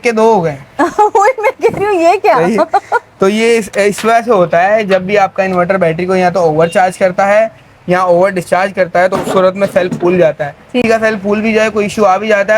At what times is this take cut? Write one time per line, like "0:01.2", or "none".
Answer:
0:10.8